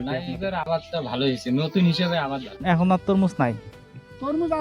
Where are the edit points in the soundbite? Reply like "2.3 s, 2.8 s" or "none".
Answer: 2.5 s